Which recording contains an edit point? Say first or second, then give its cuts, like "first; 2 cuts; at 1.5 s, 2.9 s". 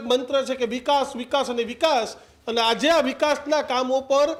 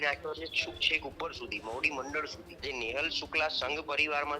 second; 1 cut; at 2.5 s